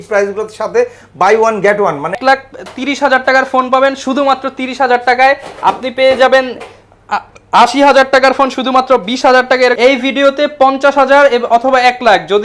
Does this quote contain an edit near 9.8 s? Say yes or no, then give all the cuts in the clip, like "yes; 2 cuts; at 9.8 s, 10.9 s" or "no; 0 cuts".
yes; 2 cuts; at 2.2 s, 9.8 s